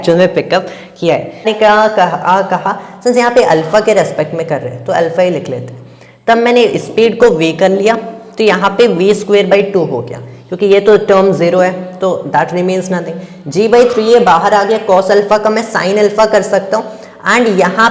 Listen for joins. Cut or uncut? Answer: cut